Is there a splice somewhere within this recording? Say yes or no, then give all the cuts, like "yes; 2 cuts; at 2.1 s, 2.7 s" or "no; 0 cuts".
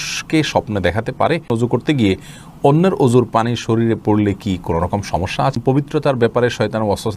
yes; 2 cuts; at 1.5 s, 5.6 s